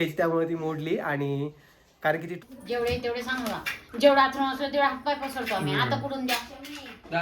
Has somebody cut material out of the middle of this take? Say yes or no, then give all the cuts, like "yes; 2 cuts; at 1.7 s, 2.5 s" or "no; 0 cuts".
yes; 1 cut; at 2.4 s